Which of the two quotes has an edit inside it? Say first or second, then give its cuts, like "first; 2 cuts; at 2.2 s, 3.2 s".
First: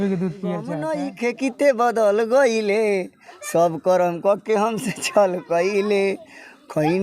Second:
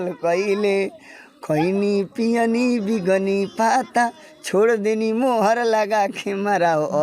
first; 1 cut; at 0.9 s